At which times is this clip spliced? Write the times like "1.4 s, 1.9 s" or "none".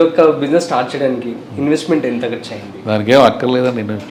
none